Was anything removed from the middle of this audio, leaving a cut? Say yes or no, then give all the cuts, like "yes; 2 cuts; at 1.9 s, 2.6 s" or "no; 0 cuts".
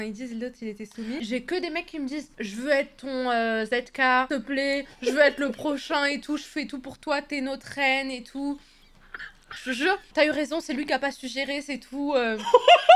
yes; 2 cuts; at 1.2 s, 10.1 s